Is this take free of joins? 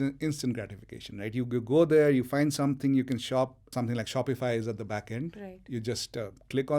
no; 1 cut; at 3.6 s

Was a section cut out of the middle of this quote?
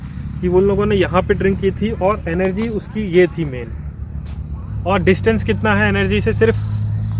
no; 0 cuts

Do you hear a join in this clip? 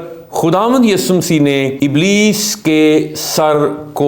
yes; 1 cut; at 1.7 s

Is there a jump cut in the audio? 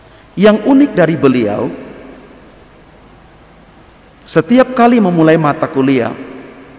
no; 0 cuts

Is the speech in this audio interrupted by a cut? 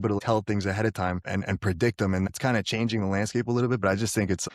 yes; 2 cuts; at 1.2 s, 2.3 s

